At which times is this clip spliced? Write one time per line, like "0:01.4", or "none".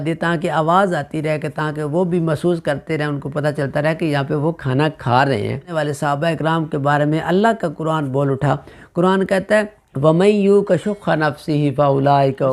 0:05.7
0:09.8